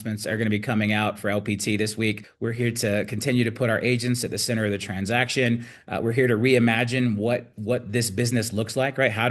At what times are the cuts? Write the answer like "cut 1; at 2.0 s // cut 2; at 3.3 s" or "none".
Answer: cut 1; at 2.3 s